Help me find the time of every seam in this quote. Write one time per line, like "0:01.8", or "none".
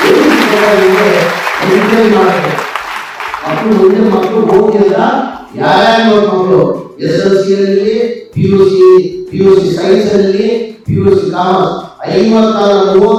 none